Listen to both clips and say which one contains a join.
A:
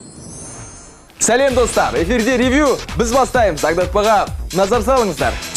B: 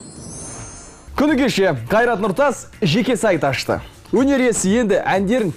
A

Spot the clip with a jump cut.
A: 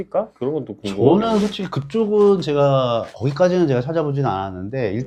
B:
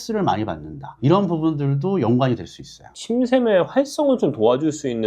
B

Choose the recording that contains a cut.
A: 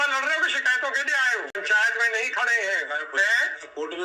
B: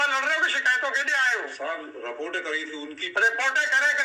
A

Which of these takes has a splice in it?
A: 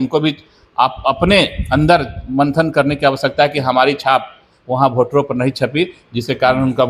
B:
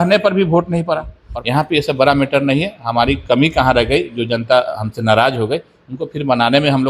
B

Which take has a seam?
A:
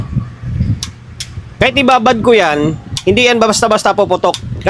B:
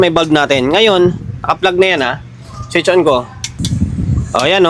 B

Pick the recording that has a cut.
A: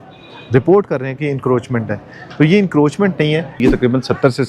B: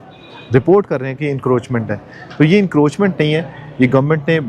A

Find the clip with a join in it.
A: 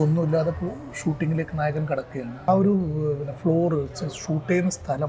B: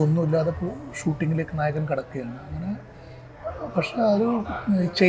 A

